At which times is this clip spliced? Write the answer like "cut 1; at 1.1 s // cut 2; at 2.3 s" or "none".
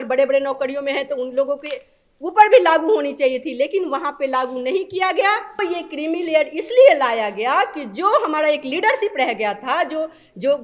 cut 1; at 5.6 s